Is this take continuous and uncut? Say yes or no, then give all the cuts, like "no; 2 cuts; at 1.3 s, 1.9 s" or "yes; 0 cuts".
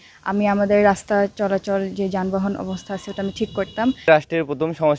no; 1 cut; at 4.1 s